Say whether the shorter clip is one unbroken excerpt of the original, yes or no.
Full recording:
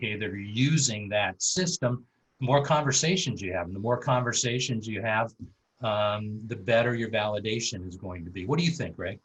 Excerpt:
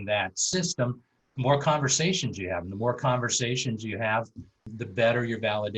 no